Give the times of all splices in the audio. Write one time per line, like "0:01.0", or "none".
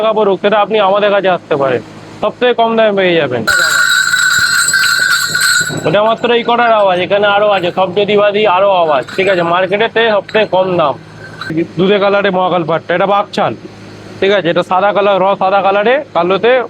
0:03.5
0:11.5